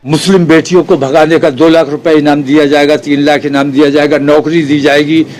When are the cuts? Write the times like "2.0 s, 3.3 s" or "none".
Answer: none